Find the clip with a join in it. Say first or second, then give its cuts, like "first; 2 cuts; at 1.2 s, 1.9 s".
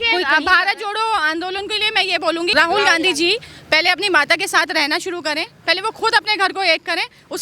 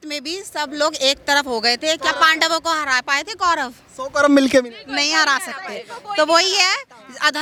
first; 1 cut; at 2.5 s